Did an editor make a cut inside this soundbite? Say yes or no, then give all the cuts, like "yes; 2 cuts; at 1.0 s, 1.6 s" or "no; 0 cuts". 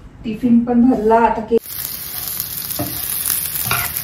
yes; 1 cut; at 1.6 s